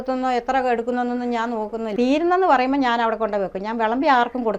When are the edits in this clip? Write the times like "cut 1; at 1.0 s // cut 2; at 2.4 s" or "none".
cut 1; at 1.9 s